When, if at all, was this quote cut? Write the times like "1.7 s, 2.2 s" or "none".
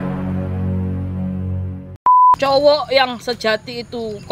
2.3 s

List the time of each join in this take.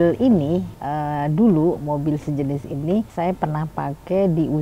none

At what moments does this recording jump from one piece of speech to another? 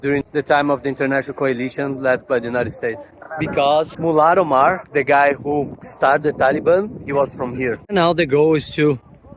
none

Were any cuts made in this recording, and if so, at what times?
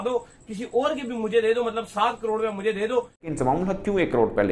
3.3 s

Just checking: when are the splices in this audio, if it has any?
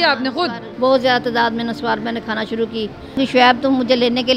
3.2 s

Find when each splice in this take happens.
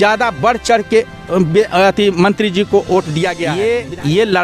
3.4 s

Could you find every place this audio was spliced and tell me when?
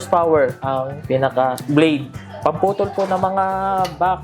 1.1 s, 2.2 s

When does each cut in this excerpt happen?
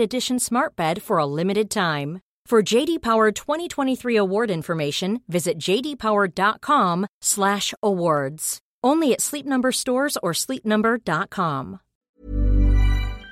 12.1 s

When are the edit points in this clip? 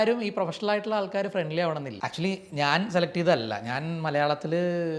2.0 s

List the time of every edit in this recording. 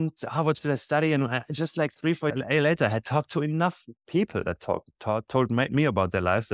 none

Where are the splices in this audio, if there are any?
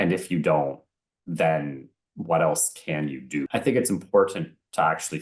3.5 s

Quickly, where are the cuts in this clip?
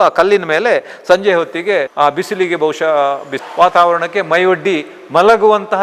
1.9 s, 3.4 s

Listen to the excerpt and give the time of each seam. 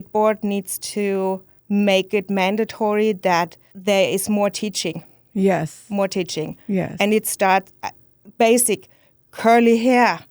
1.5 s, 3.6 s

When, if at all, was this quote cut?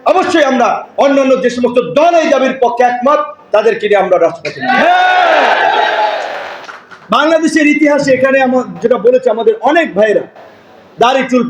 none

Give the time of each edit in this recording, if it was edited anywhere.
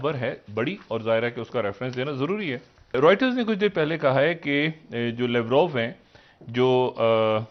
2.9 s

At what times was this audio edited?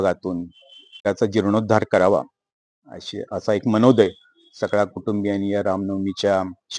1.0 s

